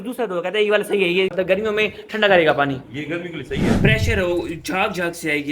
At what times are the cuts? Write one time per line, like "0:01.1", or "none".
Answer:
0:03.7